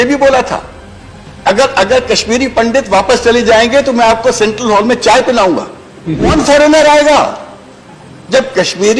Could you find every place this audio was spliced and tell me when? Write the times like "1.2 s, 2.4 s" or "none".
6.3 s